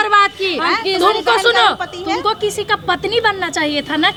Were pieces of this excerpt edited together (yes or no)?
no